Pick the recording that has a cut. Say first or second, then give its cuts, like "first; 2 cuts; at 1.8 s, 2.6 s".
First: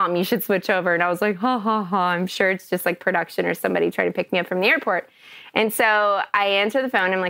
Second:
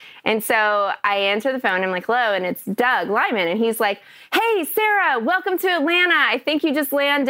first; 1 cut; at 4.3 s